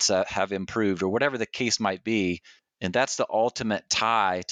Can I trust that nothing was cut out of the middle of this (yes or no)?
yes